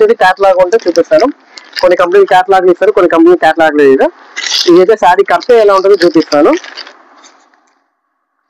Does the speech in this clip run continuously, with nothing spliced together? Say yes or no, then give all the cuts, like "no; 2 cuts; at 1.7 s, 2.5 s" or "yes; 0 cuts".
yes; 0 cuts